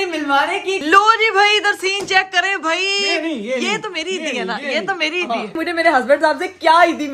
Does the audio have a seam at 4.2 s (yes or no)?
no